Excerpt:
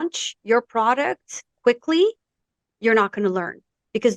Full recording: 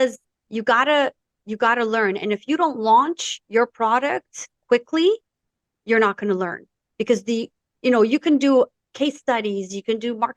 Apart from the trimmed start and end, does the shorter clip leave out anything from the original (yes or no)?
no